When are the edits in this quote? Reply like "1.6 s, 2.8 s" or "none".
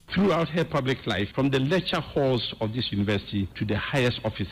none